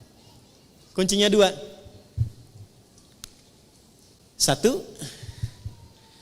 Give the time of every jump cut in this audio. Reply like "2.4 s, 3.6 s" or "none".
4.2 s